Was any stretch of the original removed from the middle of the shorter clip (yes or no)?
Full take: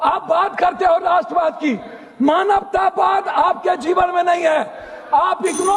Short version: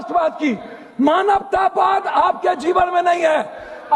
no